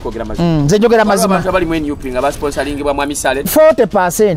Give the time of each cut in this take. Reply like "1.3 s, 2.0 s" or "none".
3.5 s